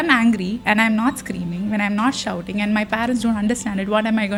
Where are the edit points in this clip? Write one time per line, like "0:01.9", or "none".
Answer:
none